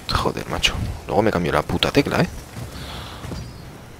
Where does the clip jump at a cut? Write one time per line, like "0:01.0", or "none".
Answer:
0:02.3